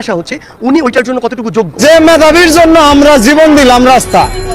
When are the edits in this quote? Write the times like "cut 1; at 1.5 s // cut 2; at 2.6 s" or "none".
cut 1; at 1.8 s